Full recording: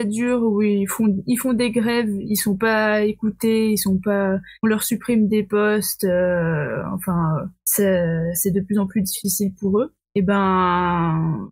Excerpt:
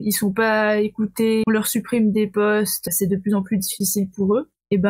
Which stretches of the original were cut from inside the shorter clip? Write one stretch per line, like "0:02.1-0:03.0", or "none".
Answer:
0:03.7-0:04.6
0:06.0-0:08.3